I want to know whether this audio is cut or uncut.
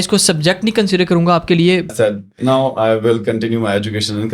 cut